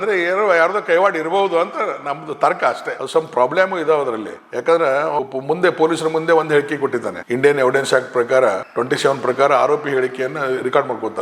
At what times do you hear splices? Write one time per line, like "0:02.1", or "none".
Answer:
0:03.0
0:05.2
0:08.7

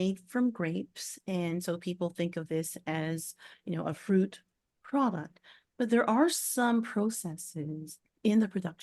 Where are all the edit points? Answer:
none

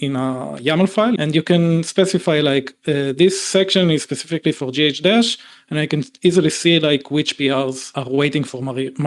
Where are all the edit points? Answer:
0:01.2
0:07.9

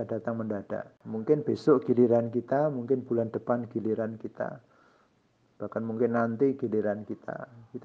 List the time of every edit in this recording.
0:01.0

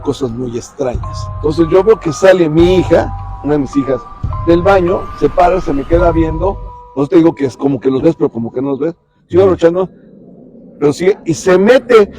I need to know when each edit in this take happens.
0:01.2

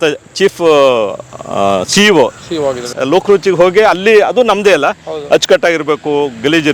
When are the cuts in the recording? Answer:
0:02.9

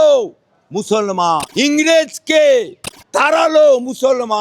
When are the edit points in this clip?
0:01.6
0:03.3

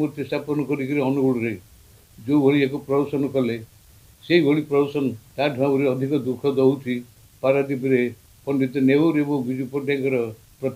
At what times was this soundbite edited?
0:05.2
0:08.3

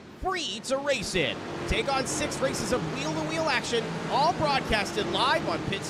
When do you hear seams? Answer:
none

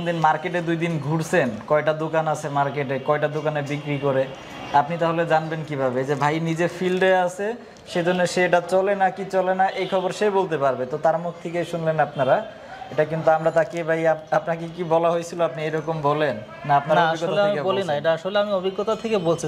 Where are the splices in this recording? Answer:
none

